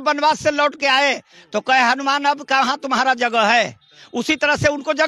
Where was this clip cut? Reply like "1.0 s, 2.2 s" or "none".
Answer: none